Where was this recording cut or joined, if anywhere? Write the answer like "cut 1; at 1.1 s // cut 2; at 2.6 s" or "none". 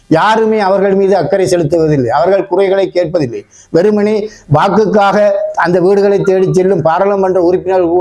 none